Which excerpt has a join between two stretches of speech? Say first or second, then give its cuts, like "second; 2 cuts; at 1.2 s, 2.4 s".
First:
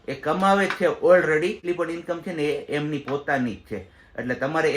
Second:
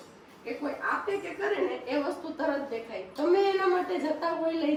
first; 1 cut; at 1.6 s